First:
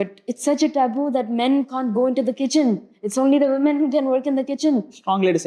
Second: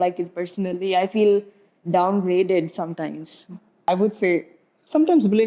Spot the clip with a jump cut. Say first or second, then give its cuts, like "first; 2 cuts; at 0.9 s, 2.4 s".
second; 1 cut; at 3.9 s